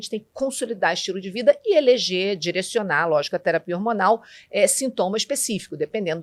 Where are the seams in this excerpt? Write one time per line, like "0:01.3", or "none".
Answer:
none